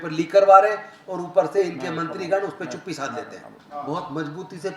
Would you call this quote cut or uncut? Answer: cut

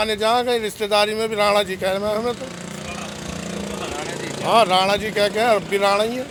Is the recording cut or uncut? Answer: uncut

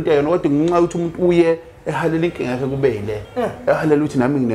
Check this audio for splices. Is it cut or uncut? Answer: cut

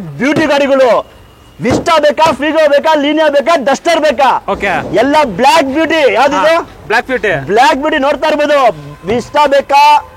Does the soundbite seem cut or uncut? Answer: uncut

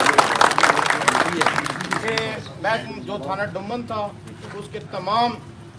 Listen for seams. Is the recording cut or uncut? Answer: uncut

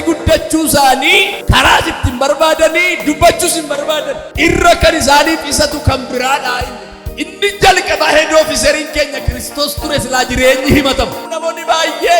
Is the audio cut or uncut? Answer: cut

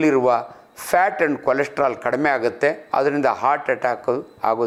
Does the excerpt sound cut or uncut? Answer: uncut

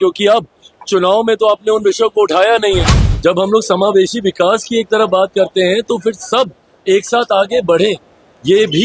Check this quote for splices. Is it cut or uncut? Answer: cut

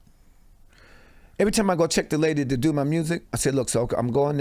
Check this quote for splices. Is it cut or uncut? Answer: cut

